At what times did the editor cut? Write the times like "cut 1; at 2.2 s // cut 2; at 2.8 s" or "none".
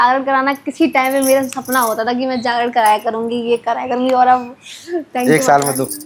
none

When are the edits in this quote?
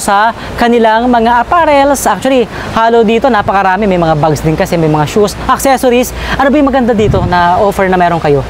none

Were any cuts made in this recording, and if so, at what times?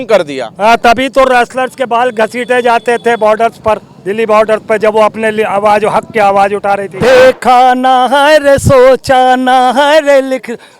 cut 1; at 6.9 s

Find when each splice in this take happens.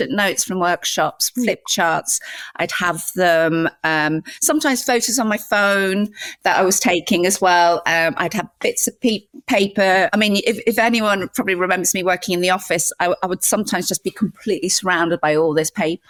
none

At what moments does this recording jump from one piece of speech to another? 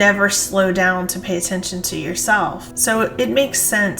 cut 1; at 2.6 s

